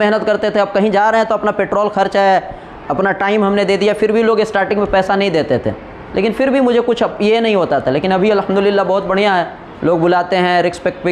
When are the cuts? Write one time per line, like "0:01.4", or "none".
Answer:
none